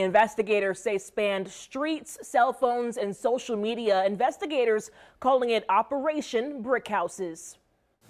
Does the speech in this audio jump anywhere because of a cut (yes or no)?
no